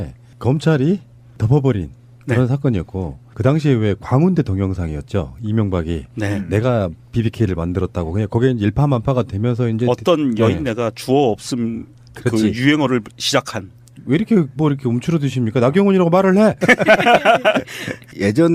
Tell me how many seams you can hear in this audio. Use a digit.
1